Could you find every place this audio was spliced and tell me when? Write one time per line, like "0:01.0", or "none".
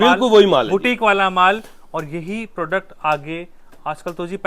none